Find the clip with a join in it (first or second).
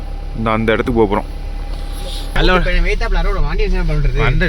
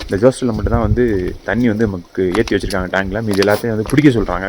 first